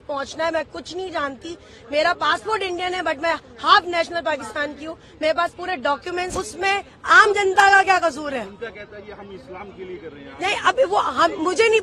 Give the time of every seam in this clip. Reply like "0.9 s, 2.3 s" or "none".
6.3 s